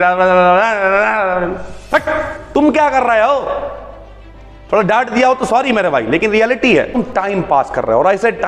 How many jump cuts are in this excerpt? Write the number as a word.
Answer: two